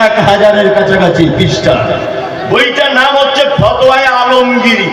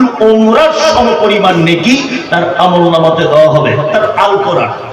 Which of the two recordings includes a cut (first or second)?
second